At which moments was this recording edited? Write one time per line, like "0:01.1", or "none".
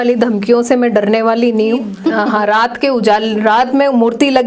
0:02.1